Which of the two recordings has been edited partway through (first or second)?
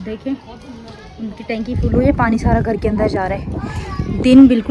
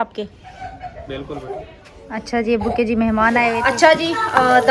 second